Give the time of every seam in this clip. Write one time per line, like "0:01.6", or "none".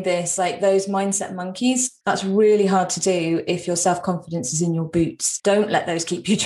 0:01.9
0:05.3